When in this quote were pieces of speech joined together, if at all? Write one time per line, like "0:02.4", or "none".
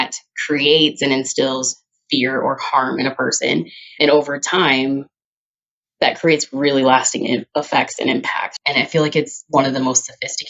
0:08.5